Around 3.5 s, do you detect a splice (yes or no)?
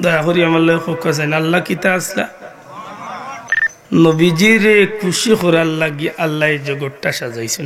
yes